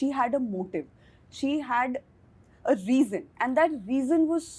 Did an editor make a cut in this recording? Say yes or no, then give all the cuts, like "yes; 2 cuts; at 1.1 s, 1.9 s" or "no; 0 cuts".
no; 0 cuts